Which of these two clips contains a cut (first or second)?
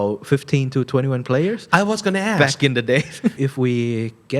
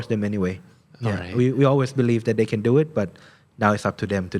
first